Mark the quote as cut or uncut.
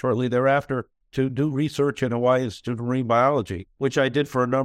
cut